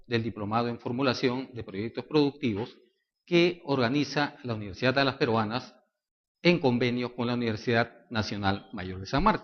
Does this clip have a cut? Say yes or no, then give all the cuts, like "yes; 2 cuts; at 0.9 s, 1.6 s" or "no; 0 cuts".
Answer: yes; 1 cut; at 6.1 s